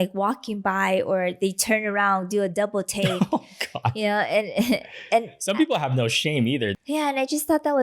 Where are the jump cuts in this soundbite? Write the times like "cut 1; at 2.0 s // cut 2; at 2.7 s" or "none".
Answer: cut 1; at 6.7 s